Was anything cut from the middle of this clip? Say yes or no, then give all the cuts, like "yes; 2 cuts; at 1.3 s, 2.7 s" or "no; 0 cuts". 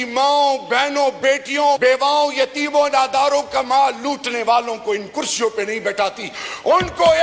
yes; 1 cut; at 1.8 s